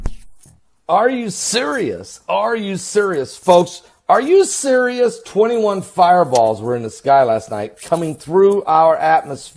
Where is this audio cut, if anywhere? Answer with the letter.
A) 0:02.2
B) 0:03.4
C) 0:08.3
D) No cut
D